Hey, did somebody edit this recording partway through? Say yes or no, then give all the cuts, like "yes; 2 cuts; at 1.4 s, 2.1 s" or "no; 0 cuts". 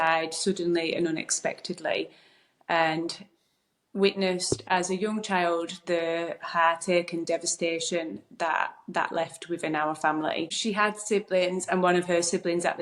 no; 0 cuts